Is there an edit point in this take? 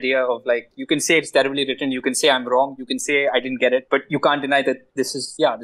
no; 0 cuts

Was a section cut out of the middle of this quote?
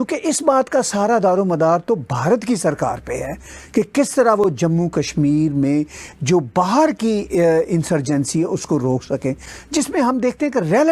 no; 0 cuts

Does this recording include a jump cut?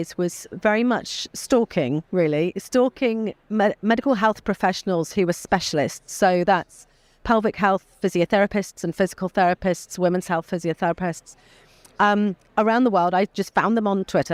no; 0 cuts

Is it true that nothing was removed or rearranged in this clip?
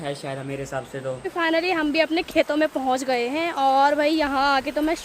no; 1 cut; at 1.2 s

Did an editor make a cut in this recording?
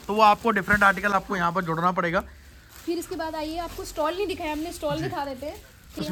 no; 0 cuts

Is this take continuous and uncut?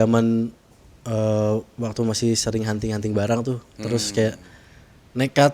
yes; 0 cuts

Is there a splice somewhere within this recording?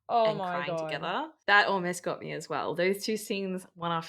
yes; 1 cut; at 1.0 s

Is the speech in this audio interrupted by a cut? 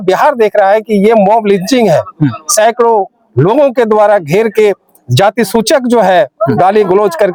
no; 0 cuts

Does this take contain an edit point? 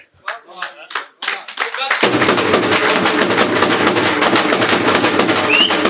no; 0 cuts

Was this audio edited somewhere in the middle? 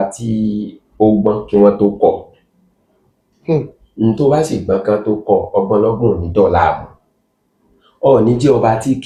no; 0 cuts

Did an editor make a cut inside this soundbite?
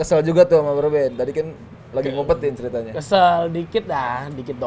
no; 0 cuts

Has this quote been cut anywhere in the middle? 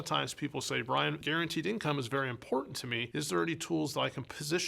yes; 1 cut; at 1.2 s

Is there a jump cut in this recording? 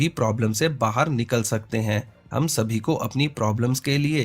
no; 0 cuts

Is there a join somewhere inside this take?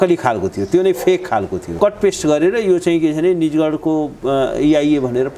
yes; 1 cut; at 1.6 s

